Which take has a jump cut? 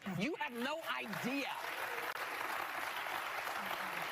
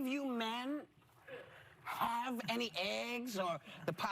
first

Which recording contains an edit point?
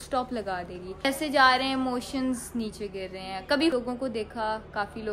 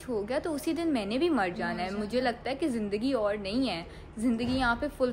first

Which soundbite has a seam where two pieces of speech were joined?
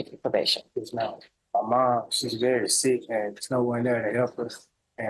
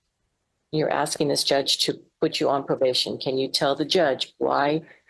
first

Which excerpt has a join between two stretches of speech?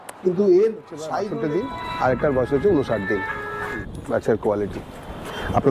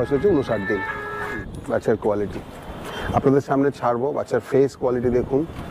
first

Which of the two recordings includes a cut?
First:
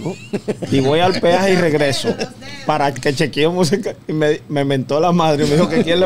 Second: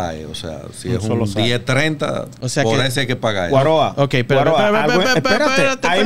second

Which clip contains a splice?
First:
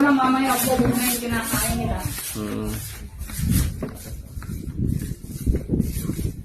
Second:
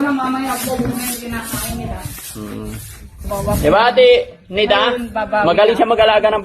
second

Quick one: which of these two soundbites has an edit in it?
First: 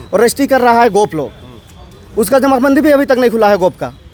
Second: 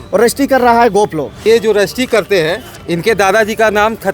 second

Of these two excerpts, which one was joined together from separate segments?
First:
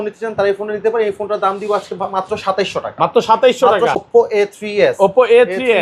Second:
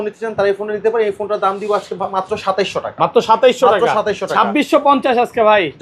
first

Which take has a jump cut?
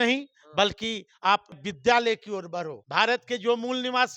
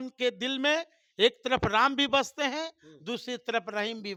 first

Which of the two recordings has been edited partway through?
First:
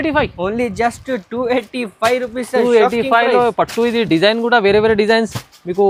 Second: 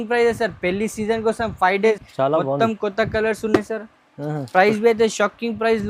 second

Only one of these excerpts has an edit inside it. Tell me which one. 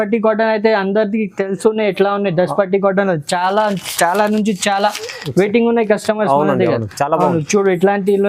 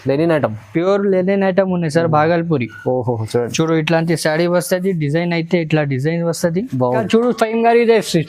second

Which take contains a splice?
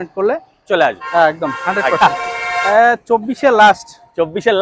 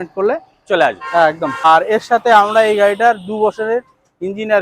second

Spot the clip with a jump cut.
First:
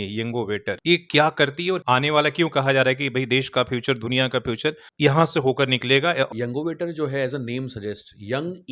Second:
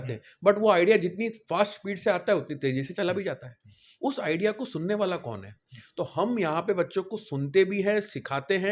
first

